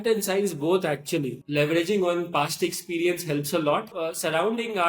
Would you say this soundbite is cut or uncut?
cut